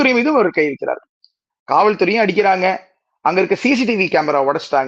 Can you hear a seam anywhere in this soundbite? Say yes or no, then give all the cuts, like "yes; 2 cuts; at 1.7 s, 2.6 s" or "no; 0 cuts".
no; 0 cuts